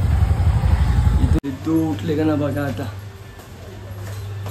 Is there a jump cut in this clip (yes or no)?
yes